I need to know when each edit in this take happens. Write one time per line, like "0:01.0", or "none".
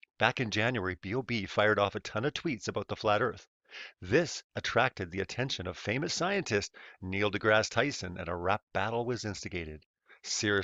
none

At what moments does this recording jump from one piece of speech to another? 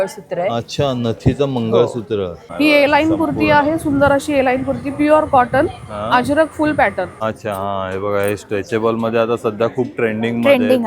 0:02.4
0:07.2

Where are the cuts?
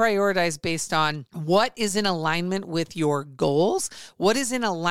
0:01.3

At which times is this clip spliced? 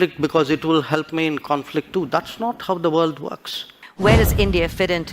0:03.8

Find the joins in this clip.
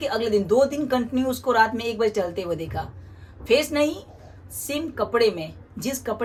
none

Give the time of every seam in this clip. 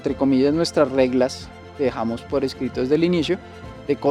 none

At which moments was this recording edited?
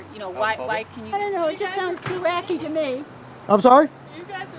0:01.1

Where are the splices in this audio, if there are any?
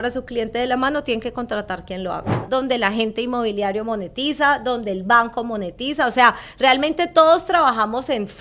0:02.4

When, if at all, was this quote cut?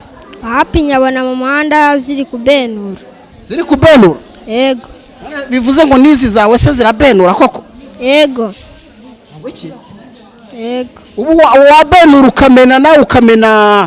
none

